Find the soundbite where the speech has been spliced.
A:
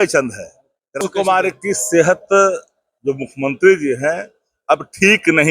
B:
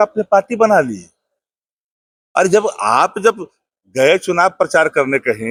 A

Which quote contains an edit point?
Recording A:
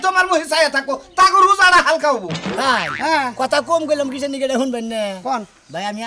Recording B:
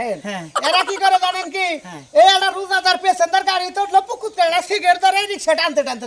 A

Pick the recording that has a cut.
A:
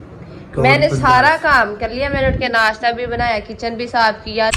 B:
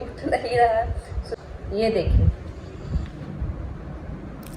B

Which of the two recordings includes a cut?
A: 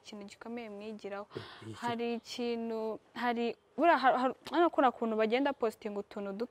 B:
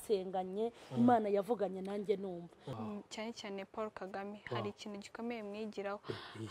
B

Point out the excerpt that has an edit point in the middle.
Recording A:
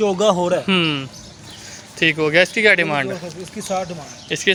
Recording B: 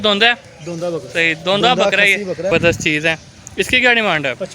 B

